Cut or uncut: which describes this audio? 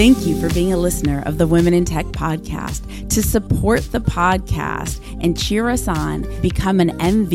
uncut